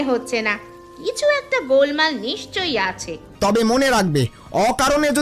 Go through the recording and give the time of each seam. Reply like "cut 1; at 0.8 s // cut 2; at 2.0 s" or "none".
cut 1; at 3.2 s